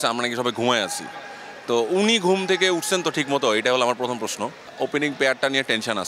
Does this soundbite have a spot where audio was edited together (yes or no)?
yes